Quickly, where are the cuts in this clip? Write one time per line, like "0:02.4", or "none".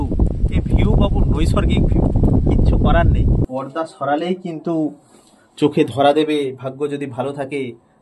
0:03.5